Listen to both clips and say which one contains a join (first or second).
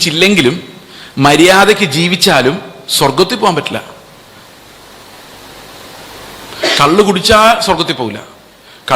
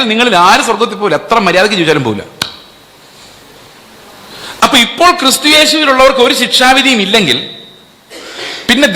second